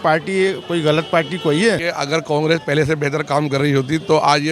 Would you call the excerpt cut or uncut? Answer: cut